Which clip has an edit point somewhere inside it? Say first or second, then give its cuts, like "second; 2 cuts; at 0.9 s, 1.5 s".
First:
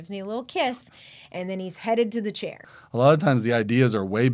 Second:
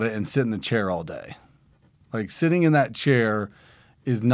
first; 1 cut; at 2.7 s